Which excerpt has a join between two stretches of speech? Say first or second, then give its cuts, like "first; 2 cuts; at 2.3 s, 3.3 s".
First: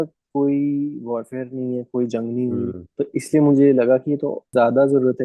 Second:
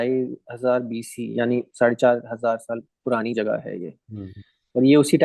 first; 2 cuts; at 2.8 s, 4.4 s